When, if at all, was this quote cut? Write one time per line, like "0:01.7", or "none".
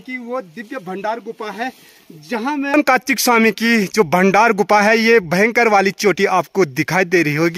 0:02.7